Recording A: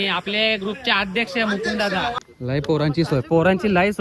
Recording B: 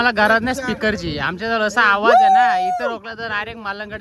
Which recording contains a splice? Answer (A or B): A